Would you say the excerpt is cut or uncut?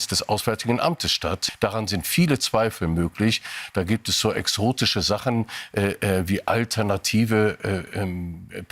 cut